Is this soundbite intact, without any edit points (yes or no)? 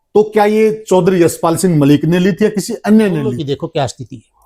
yes